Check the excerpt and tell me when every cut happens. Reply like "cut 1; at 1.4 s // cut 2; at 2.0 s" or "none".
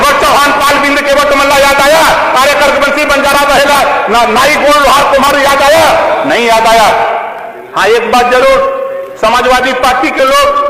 cut 1; at 7.4 s